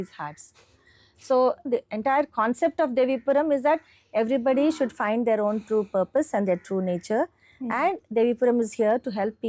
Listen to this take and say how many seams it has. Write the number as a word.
one